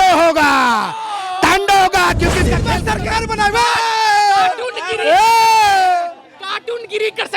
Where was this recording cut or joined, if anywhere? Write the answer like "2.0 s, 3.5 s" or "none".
2.6 s